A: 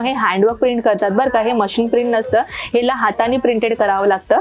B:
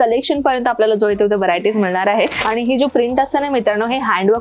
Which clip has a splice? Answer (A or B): B